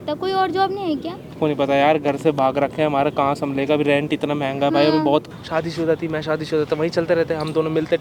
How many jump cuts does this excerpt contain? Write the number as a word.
two